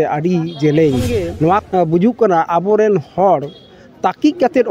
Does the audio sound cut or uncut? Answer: cut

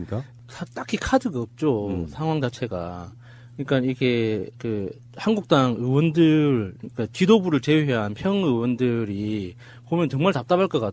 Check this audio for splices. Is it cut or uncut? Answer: cut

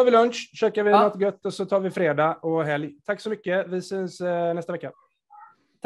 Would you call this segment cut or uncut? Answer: uncut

